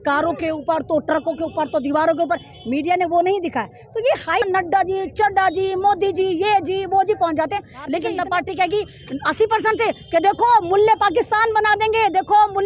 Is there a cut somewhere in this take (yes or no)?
yes